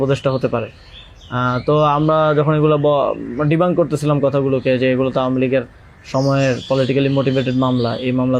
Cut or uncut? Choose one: uncut